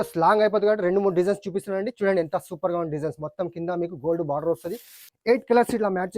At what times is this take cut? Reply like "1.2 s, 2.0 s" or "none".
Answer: 5.0 s